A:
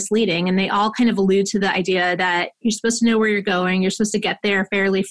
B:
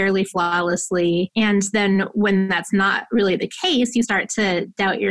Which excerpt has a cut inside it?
B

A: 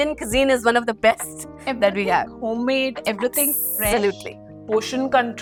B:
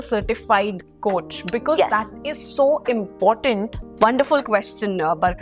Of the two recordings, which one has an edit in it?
B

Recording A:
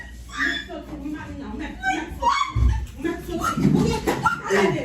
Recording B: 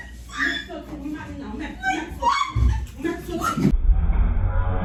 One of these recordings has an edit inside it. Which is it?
A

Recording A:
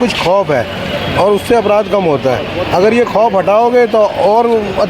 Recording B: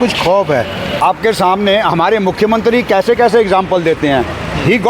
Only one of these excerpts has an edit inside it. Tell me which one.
B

